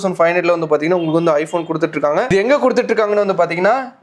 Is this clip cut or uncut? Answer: uncut